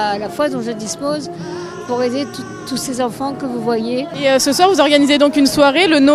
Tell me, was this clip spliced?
no; 0 cuts

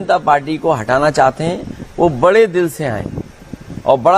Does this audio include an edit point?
no; 0 cuts

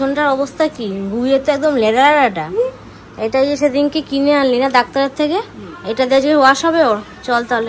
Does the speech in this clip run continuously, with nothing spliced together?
yes; 0 cuts

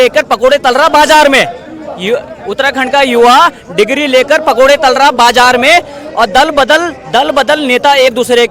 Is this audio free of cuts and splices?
yes; 0 cuts

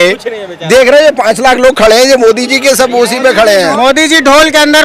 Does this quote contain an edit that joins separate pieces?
yes; 1 cut; at 3.7 s

